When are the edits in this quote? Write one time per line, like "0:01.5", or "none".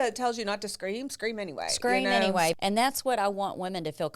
0:02.5